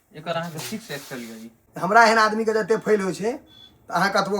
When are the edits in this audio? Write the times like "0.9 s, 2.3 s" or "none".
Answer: 1.6 s